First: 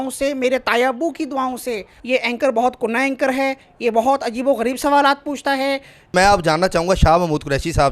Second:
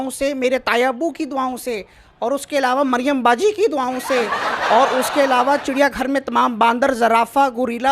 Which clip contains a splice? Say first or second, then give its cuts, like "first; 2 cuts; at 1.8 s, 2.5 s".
first; 2 cuts; at 1.9 s, 6.1 s